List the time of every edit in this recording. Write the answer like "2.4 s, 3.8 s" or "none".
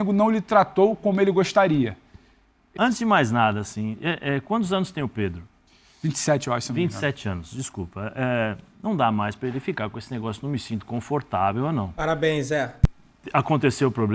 2.7 s